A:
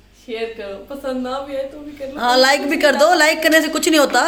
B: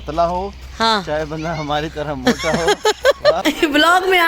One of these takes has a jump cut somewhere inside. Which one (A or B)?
B